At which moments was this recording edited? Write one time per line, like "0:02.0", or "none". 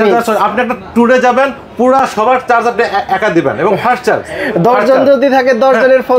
none